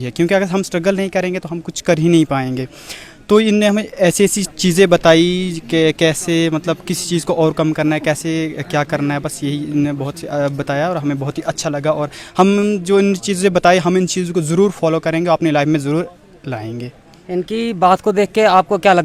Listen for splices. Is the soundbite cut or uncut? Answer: uncut